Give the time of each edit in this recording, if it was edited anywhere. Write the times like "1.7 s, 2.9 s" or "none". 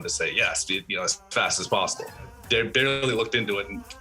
2.4 s